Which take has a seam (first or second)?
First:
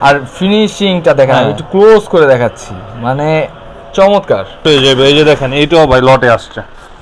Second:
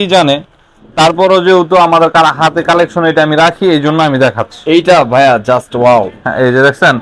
first